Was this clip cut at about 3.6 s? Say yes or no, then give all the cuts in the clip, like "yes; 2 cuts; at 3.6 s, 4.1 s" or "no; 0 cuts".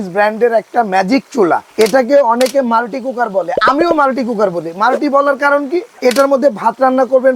no; 2 cuts; at 1.7 s, 5.9 s